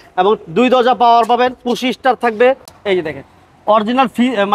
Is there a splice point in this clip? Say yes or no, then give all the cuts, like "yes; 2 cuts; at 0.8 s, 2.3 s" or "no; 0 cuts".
no; 0 cuts